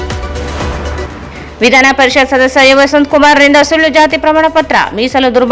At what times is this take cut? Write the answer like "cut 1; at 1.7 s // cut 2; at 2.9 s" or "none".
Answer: cut 1; at 1.1 s